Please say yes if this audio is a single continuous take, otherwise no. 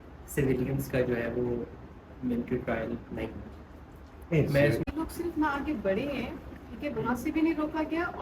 no